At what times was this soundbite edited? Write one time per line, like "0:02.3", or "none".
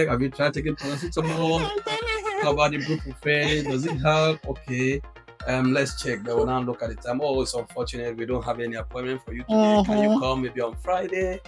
none